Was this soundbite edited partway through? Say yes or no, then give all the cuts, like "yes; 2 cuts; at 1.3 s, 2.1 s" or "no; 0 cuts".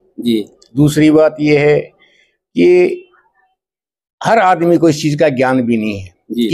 no; 0 cuts